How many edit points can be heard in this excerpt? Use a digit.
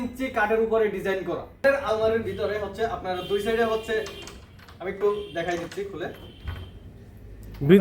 1